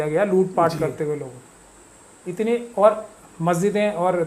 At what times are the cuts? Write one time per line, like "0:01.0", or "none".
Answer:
none